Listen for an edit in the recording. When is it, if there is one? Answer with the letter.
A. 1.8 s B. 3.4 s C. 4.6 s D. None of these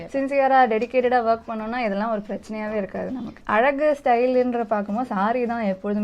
B